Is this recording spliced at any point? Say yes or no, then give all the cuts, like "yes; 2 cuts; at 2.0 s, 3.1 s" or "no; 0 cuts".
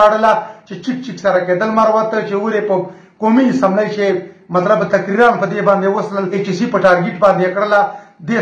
yes; 1 cut; at 6.3 s